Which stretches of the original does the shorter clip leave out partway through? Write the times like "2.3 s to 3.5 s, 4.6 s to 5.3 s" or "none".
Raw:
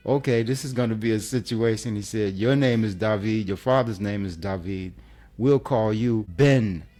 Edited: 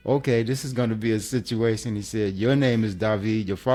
none